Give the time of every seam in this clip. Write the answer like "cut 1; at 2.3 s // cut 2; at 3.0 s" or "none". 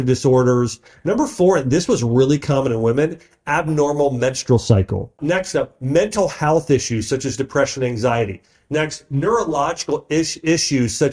cut 1; at 5.2 s